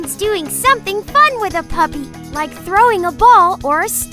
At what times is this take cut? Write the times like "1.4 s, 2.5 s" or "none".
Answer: none

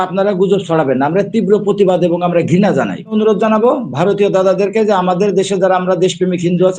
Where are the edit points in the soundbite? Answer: 3.1 s

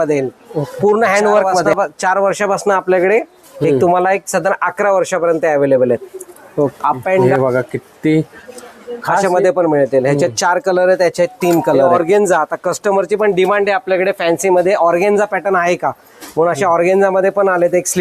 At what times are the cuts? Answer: 1.7 s, 7.3 s, 11.9 s

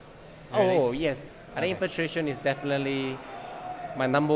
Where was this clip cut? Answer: 1.2 s

